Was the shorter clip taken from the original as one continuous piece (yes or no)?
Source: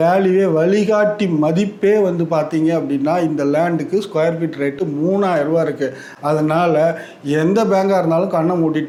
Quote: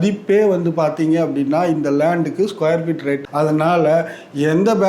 no